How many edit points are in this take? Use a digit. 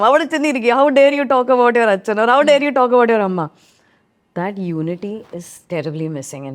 0